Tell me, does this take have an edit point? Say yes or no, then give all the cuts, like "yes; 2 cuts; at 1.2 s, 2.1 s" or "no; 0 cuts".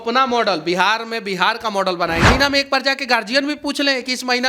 yes; 1 cut; at 2.3 s